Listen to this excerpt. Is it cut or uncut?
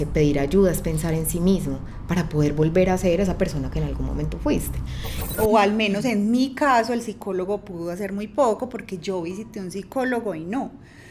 cut